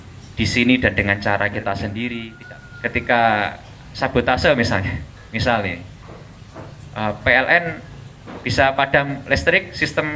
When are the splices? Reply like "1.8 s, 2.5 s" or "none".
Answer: 2.3 s